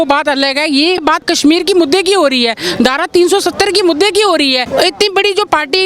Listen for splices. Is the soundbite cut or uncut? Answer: cut